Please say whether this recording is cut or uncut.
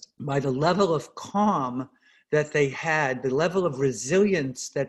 uncut